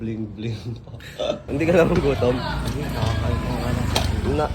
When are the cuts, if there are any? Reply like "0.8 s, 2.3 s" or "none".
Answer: 1.5 s